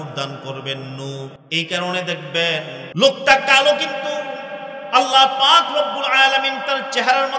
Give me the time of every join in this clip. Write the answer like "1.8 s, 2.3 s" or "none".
1.4 s, 2.8 s